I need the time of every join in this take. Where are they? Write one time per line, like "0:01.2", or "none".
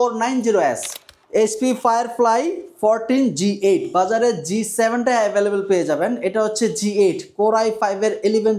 0:01.1